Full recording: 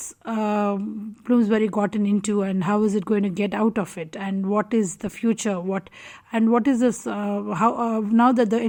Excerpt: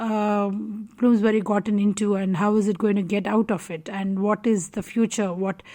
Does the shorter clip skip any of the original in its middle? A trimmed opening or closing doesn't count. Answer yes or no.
no